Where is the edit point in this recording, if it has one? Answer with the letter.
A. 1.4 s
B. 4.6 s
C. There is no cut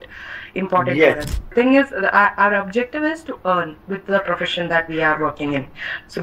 A